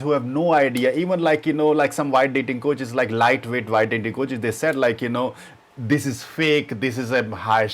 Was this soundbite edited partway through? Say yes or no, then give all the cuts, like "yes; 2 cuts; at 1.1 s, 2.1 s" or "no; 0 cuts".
no; 0 cuts